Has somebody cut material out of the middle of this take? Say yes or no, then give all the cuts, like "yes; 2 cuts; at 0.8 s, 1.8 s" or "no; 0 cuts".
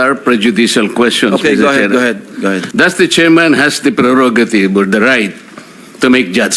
yes; 1 cut; at 2.7 s